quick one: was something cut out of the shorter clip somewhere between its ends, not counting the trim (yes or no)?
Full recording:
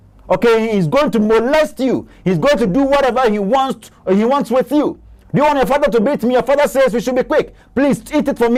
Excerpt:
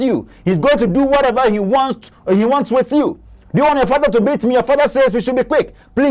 no